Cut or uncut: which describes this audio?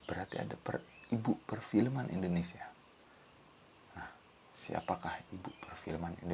uncut